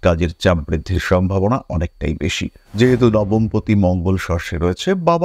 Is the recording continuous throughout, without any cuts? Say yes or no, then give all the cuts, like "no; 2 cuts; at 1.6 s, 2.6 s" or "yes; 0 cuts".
no; 1 cut; at 2.6 s